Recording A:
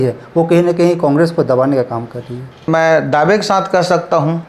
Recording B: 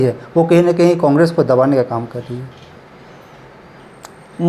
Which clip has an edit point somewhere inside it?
A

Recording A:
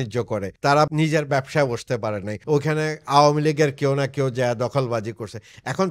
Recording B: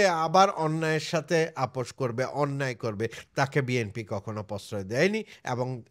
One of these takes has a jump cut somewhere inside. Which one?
A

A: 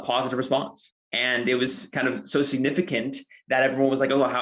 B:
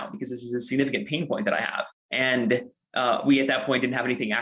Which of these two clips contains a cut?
A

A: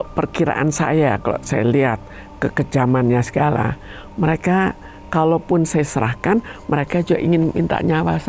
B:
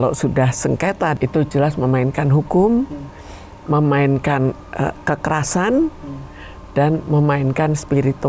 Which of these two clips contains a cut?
B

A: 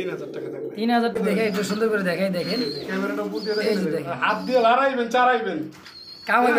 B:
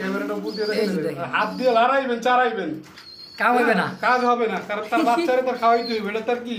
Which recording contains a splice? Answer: A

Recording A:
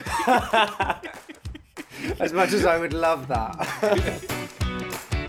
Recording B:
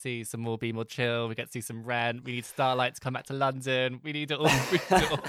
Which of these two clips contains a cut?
A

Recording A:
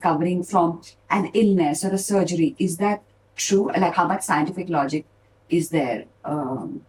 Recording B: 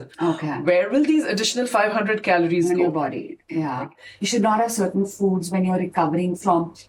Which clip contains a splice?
B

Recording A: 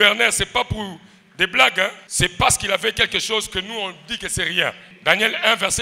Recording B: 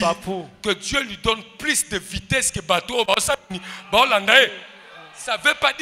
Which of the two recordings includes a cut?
A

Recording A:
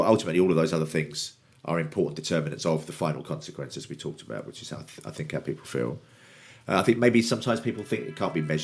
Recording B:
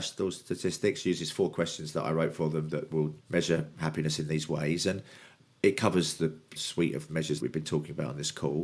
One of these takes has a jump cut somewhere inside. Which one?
B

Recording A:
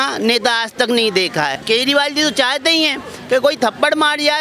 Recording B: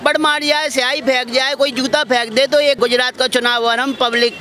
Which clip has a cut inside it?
A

